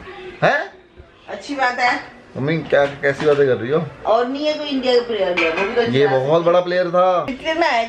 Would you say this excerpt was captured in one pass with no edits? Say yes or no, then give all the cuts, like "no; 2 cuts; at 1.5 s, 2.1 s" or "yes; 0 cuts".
yes; 0 cuts